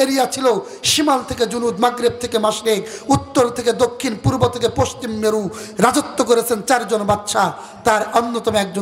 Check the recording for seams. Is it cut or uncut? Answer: uncut